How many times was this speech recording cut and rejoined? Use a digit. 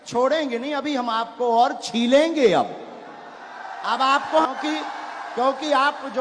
1